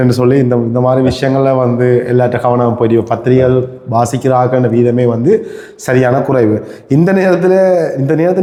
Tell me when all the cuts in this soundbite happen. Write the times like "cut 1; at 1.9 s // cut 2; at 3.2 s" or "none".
none